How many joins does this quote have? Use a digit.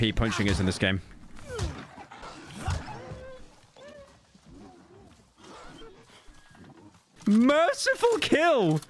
2